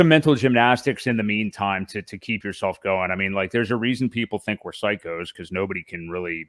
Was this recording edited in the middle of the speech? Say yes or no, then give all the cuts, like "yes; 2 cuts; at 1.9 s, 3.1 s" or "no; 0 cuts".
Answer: no; 0 cuts